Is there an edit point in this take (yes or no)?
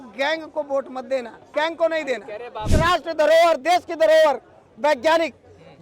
yes